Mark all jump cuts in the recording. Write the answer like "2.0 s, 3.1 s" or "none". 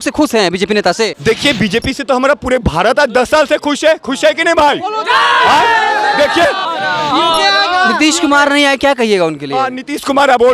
1.2 s, 6.6 s